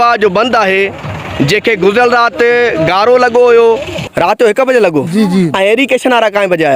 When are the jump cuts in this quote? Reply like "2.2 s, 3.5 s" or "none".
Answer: 4.1 s